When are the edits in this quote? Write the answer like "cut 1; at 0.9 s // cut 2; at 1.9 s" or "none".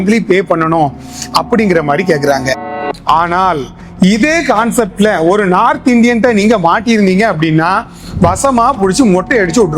cut 1; at 2.8 s